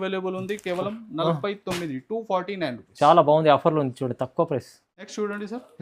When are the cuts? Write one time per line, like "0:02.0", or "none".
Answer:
none